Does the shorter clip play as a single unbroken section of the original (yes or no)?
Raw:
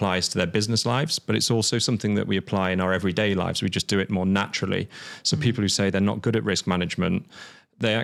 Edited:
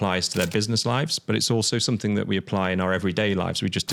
yes